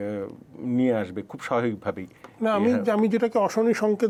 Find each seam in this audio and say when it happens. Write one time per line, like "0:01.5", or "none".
none